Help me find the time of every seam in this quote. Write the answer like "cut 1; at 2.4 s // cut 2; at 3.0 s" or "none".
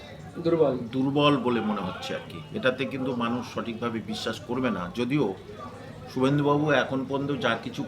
none